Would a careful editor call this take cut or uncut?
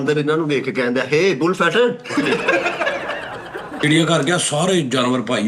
cut